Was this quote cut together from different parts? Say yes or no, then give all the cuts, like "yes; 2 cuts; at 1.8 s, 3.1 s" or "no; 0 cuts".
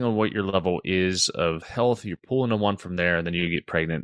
yes; 1 cut; at 1.6 s